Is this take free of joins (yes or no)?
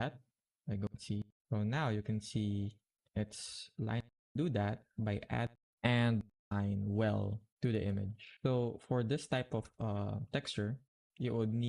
no